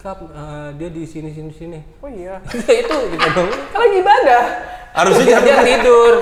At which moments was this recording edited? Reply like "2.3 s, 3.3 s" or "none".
none